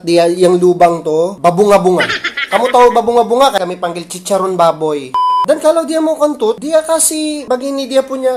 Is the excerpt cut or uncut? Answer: cut